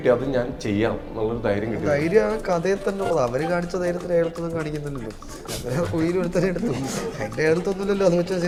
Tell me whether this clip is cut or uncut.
uncut